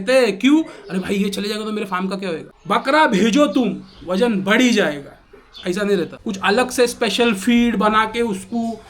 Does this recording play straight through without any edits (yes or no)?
no